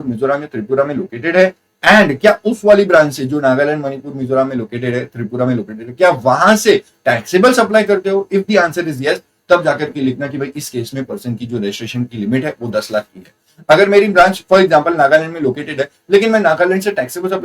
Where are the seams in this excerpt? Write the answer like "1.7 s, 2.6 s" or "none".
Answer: none